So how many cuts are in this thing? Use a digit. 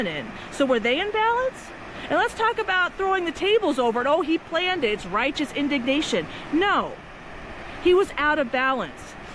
0